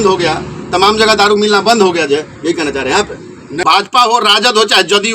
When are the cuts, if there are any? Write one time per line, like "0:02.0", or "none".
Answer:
0:03.6